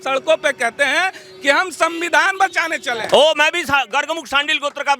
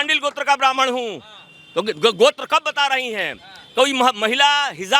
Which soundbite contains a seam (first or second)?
first